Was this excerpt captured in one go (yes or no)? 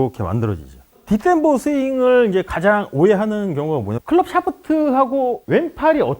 no